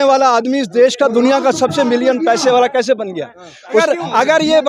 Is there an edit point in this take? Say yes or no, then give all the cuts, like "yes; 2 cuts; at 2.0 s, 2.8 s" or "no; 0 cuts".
yes; 1 cut; at 3.5 s